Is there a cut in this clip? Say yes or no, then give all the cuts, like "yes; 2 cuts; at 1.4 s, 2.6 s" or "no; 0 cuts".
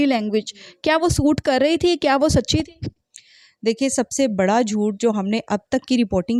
no; 0 cuts